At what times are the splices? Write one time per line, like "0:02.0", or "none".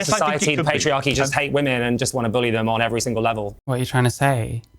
0:03.6